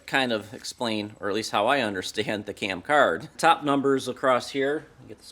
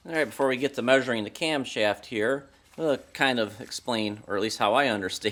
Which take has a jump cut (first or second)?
first